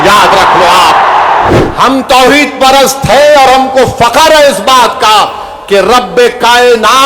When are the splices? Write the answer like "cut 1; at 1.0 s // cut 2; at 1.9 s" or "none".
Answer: cut 1; at 1.5 s

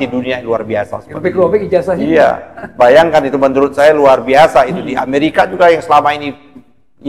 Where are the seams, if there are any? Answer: none

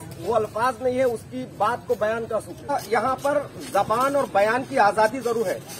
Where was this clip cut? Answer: cut 1; at 2.7 s

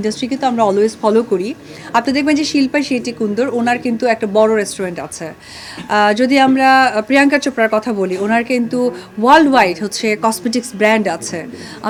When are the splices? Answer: none

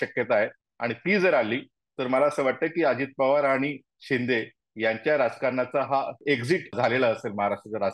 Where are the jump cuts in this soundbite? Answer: cut 1; at 6.7 s

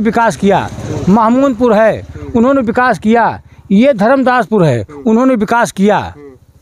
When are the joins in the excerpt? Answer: none

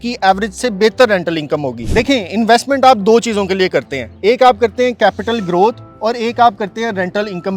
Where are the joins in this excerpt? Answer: none

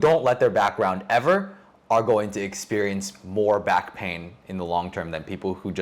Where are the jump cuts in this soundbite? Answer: none

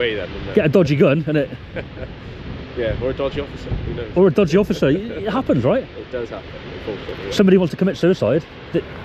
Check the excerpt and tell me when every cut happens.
none

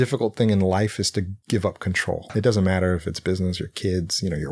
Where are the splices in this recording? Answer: cut 1; at 1.4 s // cut 2; at 2.3 s

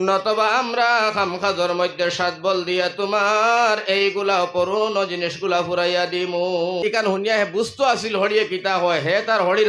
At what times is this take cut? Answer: cut 1; at 6.8 s

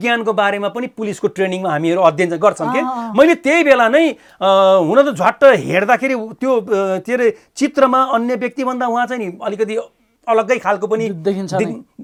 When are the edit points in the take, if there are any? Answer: none

